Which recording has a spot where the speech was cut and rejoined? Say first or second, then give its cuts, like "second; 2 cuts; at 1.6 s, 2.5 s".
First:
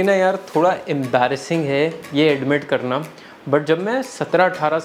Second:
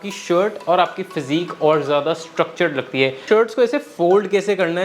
second; 1 cut; at 3.2 s